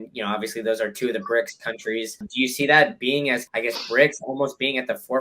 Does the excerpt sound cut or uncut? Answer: cut